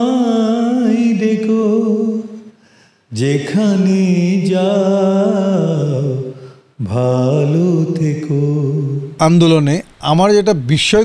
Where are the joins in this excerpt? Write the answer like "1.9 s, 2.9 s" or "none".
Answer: 9.0 s